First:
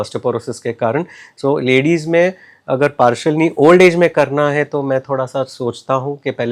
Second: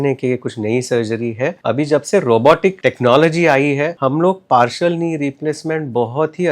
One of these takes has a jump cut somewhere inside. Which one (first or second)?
second